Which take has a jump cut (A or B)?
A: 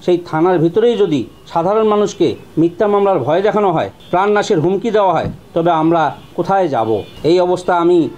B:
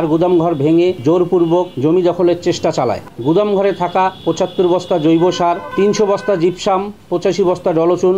B